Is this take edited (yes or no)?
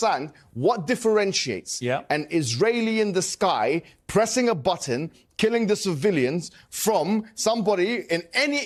no